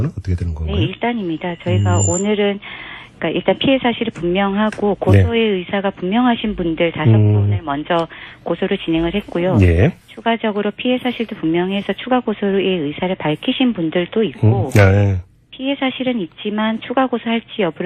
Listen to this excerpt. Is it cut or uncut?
uncut